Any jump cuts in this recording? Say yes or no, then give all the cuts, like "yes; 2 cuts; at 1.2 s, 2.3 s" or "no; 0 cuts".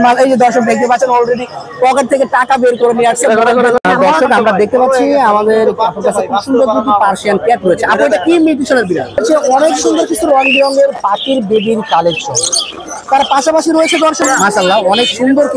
yes; 3 cuts; at 3.8 s, 9.2 s, 14.2 s